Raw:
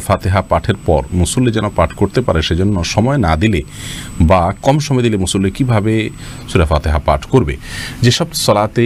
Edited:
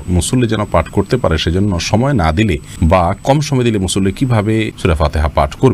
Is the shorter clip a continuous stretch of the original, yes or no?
no